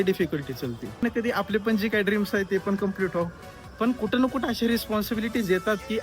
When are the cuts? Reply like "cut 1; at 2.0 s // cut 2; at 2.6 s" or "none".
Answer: cut 1; at 1.0 s